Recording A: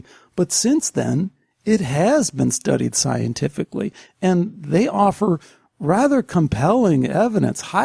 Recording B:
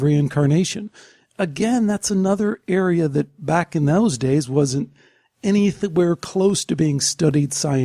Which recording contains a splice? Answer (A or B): A